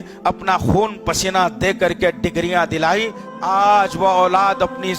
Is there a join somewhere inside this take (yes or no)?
yes